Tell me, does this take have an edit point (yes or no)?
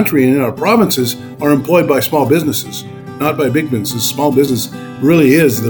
no